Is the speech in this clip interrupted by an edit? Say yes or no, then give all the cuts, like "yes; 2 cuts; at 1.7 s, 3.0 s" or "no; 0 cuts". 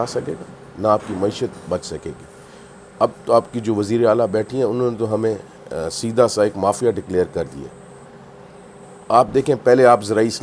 no; 0 cuts